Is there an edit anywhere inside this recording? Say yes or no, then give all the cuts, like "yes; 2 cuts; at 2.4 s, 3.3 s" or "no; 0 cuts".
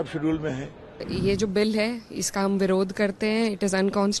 yes; 1 cut; at 1.1 s